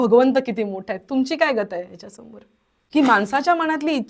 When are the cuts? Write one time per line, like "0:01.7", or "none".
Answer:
0:02.7